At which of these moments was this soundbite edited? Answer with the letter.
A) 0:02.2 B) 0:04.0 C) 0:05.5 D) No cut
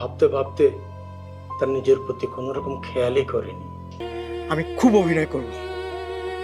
B